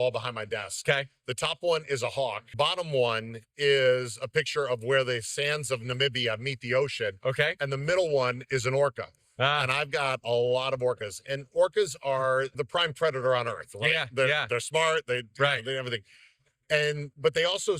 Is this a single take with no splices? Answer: no; 2 cuts; at 2.5 s, 12.5 s

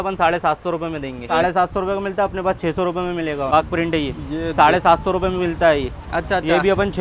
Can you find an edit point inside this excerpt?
yes; 2 cuts; at 1.3 s, 3.5 s

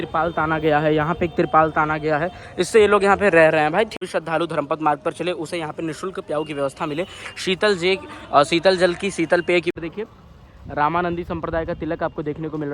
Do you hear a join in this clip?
yes; 2 cuts; at 4.0 s, 9.7 s

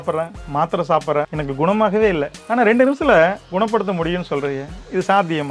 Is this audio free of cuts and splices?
yes; 0 cuts

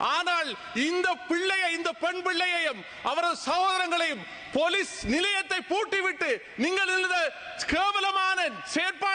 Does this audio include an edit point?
no; 0 cuts

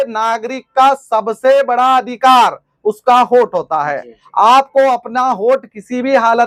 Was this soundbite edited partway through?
no; 0 cuts

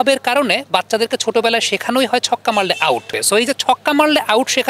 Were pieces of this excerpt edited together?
yes; 1 cut; at 3.2 s

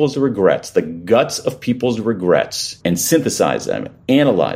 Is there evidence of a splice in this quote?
yes; 1 cut; at 2.6 s

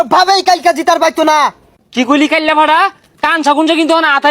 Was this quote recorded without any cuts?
no; 1 cut; at 1.7 s

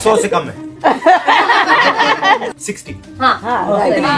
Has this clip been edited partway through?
yes; 1 cut; at 2.5 s

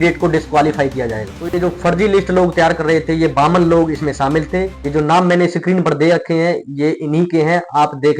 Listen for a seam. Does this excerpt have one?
no; 0 cuts

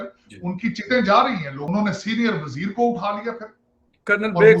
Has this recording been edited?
yes; 1 cut; at 1.5 s

